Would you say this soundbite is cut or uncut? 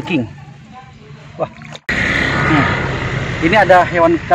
cut